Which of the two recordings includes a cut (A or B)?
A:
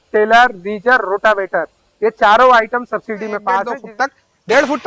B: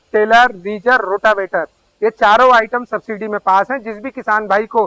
A